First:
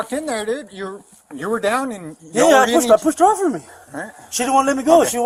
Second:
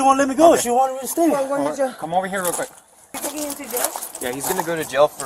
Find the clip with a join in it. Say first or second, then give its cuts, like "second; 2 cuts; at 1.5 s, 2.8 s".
second; 1 cut; at 3.2 s